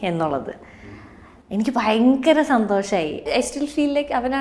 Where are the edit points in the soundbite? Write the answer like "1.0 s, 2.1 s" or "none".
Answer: 3.3 s